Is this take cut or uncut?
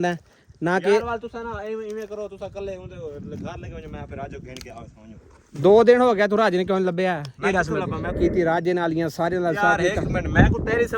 cut